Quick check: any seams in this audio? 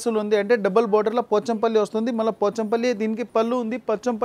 no; 0 cuts

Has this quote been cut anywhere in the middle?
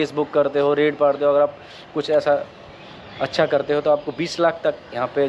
no; 0 cuts

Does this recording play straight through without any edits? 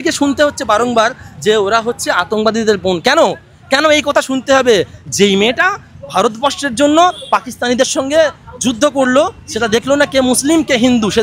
yes; 0 cuts

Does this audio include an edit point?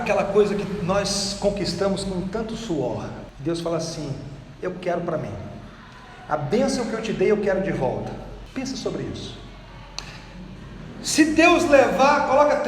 yes; 2 cuts; at 3.3 s, 8.4 s

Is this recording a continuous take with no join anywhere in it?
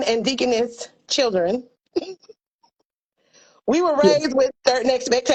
yes; 0 cuts

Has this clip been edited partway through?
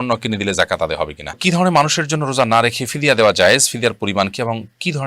yes; 1 cut; at 1.4 s

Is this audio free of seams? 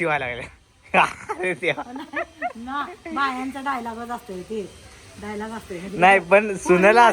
yes; 0 cuts

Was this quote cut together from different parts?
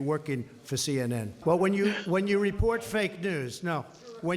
yes; 1 cut; at 1.3 s

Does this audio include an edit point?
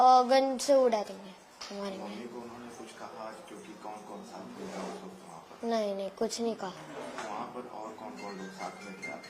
no; 0 cuts

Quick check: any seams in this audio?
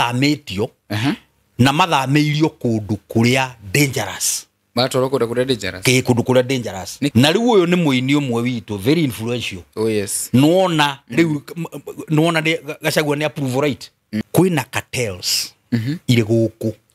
yes; 2 cuts; at 7.1 s, 14.2 s

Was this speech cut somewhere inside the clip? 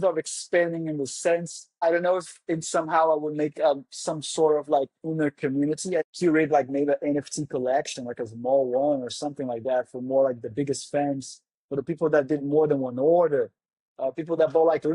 yes; 2 cuts; at 1.6 s, 6.1 s

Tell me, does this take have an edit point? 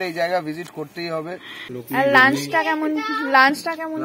yes; 1 cut; at 1.7 s

